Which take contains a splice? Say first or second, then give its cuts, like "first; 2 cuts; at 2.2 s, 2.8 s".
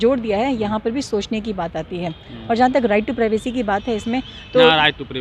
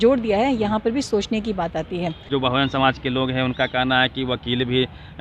second; 1 cut; at 2.2 s